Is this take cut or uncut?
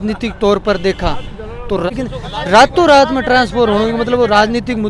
uncut